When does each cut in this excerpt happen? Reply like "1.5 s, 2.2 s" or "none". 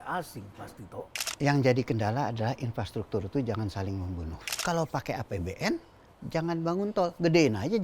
1.2 s, 4.6 s